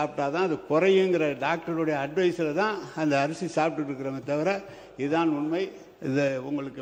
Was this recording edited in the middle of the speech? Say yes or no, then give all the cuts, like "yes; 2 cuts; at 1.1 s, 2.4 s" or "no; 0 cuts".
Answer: no; 0 cuts